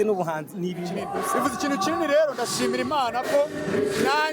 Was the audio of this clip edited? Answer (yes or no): yes